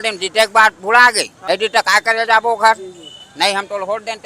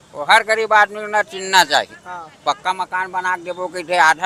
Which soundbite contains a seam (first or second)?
first